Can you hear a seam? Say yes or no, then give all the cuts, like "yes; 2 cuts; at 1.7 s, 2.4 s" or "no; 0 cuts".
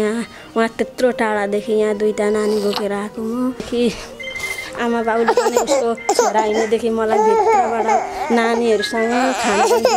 yes; 1 cut; at 3.6 s